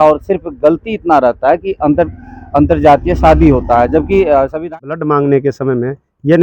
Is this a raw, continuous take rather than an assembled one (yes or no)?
no